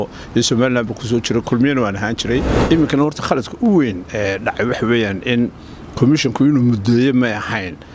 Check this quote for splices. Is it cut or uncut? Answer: cut